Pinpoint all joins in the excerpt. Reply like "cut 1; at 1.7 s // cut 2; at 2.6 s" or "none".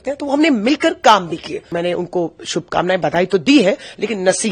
cut 1; at 1.6 s